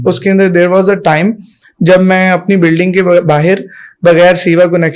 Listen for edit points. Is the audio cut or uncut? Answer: uncut